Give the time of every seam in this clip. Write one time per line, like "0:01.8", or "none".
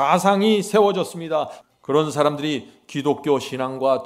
0:01.6